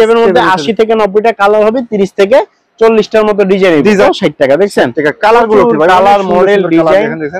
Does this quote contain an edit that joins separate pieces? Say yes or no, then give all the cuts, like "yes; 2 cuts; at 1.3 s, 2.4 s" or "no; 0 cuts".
yes; 1 cut; at 4.0 s